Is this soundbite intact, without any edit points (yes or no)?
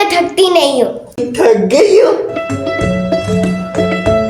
no